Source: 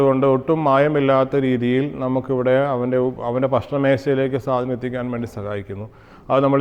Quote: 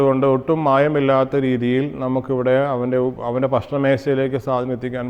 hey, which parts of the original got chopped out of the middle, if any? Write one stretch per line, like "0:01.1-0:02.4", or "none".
none